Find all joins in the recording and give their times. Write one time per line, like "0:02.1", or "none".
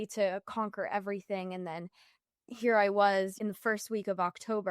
0:03.4